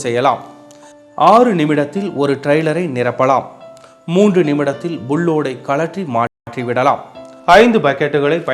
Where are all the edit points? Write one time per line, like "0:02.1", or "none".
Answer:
0:02.7